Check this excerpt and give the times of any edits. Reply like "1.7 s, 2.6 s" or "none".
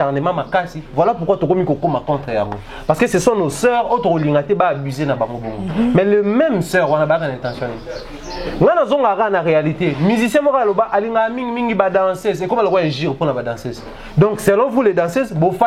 none